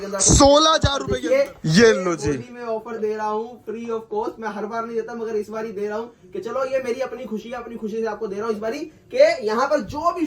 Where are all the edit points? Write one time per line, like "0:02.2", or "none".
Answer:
0:01.1